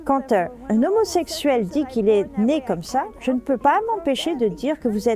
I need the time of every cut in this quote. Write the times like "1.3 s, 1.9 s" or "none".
none